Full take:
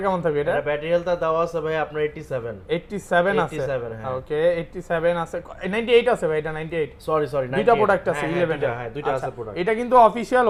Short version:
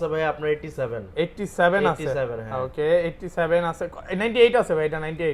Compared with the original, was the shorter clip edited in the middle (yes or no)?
no